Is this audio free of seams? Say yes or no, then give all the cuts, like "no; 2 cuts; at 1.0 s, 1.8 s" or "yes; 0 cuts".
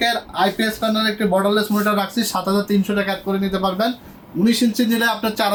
yes; 0 cuts